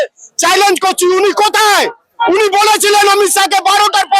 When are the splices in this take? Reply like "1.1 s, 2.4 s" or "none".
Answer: none